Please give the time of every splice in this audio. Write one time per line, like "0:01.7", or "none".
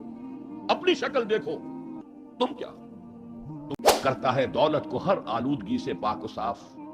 0:03.8